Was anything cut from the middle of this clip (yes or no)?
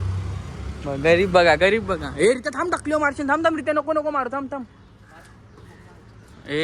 no